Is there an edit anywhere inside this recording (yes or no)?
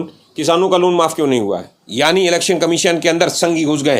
yes